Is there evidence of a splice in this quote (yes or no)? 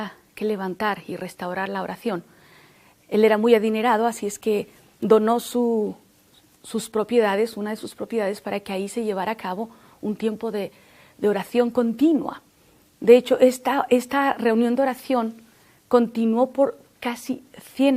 yes